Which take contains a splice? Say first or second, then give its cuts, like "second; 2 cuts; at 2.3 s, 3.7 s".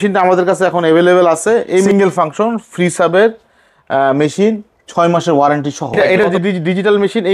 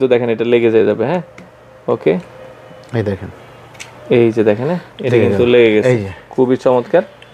first; 2 cuts; at 1.9 s, 6.2 s